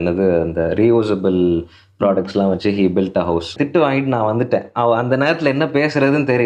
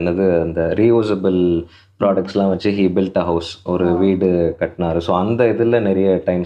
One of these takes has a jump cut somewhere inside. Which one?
first; 1 cut; at 3.5 s

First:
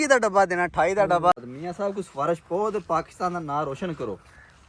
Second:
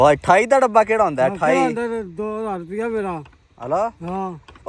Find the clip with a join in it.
first; 1 cut; at 1.3 s

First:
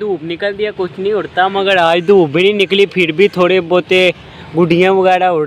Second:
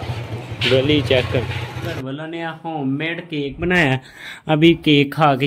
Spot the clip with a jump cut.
second; 1 cut; at 1.9 s

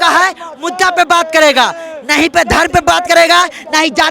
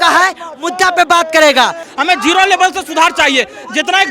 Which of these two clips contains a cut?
second; 1 cut; at 1.9 s

